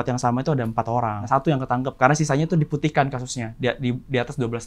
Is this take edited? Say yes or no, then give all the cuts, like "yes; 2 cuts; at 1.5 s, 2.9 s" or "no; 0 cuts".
yes; 1 cut; at 1.2 s